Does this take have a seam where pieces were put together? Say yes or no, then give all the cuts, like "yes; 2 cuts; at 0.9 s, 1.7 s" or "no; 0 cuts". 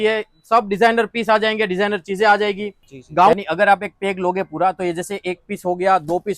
yes; 1 cut; at 3.3 s